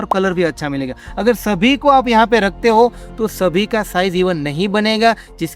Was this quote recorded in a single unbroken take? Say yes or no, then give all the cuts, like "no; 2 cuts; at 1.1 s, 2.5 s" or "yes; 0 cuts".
yes; 0 cuts